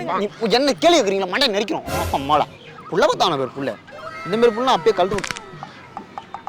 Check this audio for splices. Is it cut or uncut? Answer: cut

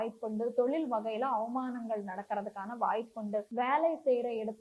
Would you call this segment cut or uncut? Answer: cut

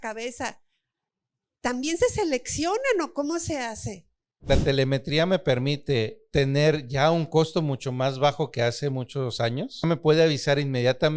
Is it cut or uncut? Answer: cut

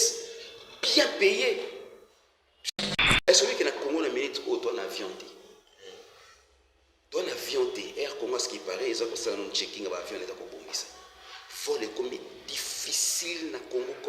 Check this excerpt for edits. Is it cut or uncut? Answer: cut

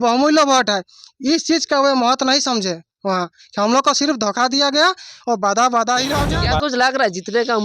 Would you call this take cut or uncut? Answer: cut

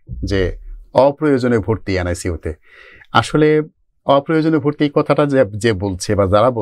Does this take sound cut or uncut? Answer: uncut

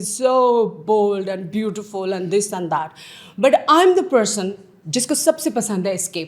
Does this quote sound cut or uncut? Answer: uncut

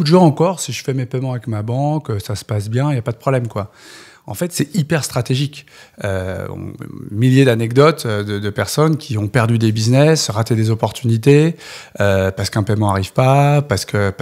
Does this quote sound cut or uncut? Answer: uncut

